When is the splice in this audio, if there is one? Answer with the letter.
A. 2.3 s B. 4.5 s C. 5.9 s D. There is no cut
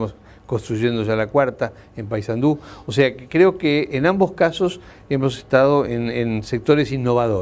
B